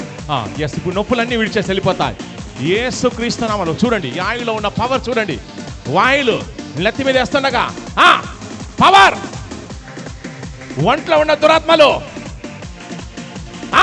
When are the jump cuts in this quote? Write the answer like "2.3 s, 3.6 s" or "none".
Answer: none